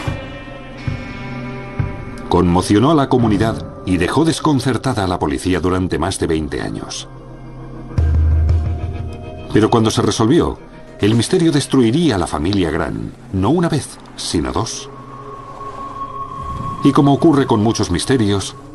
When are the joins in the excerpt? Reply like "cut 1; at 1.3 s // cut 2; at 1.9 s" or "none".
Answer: cut 1; at 6.7 s